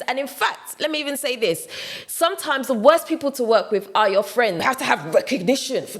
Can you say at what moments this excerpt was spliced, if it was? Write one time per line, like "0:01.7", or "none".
0:04.6

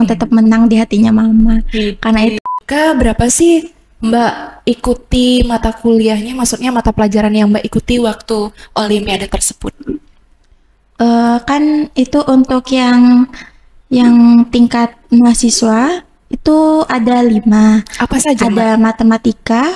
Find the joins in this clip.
0:02.4

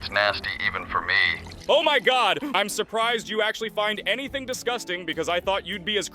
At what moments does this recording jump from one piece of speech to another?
0:02.5

